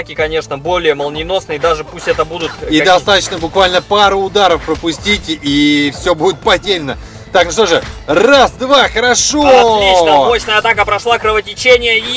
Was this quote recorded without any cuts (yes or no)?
yes